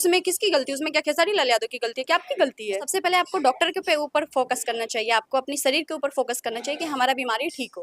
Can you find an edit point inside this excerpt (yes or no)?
yes